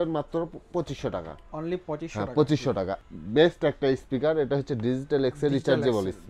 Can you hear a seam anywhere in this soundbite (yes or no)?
yes